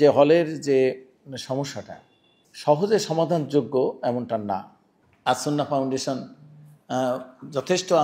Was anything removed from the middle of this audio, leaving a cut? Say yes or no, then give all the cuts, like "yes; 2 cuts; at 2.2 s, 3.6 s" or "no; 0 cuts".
no; 0 cuts